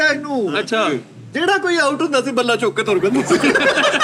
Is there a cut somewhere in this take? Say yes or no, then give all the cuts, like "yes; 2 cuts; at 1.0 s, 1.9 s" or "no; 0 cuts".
no; 0 cuts